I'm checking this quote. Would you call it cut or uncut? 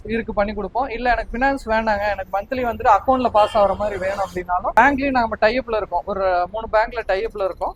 uncut